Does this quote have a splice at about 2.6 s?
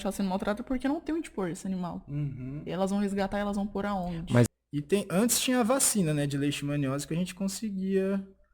no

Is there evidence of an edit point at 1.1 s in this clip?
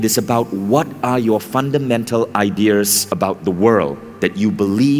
no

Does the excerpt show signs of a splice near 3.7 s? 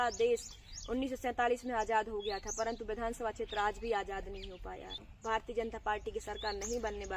no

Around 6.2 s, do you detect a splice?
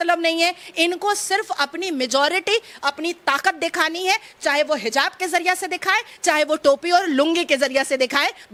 no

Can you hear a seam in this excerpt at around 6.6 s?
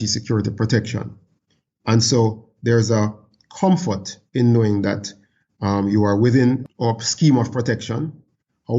yes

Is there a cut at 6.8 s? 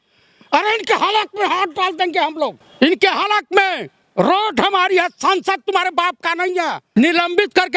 yes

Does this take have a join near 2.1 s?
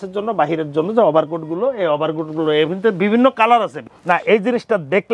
no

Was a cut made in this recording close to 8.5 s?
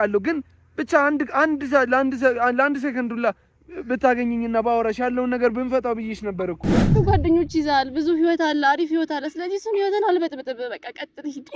no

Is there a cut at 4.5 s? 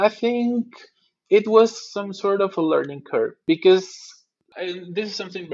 yes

